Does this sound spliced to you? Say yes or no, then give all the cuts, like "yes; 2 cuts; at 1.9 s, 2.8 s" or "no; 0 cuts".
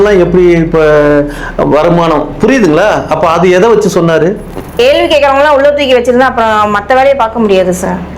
yes; 1 cut; at 4.8 s